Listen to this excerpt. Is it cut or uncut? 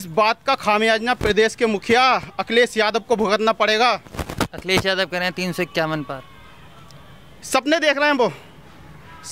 uncut